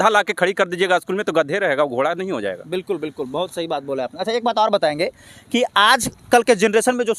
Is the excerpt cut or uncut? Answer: uncut